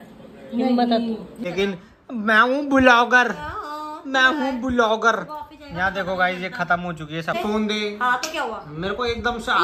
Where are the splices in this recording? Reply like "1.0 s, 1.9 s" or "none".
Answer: 1.4 s, 7.4 s